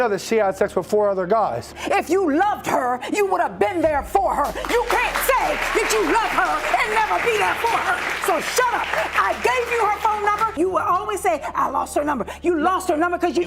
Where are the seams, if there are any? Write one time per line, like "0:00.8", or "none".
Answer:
0:01.7
0:10.6